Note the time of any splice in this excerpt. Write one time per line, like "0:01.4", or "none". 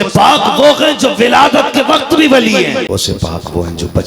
0:02.9